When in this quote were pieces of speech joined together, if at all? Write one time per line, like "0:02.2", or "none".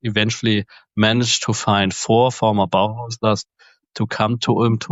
none